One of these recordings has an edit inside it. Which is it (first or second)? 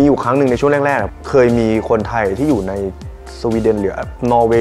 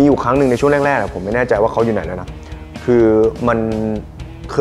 first